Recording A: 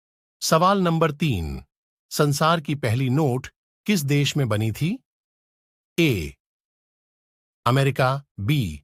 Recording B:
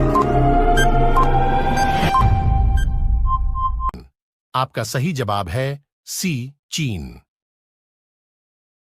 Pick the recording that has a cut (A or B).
B